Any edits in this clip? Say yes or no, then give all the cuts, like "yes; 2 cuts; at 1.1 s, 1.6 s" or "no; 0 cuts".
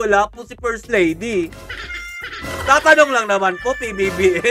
no; 0 cuts